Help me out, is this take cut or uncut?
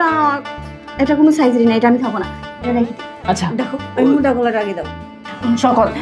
uncut